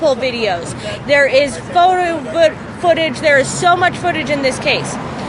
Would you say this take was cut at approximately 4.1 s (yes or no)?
no